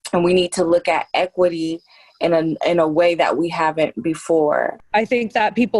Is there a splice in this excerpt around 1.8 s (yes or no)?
no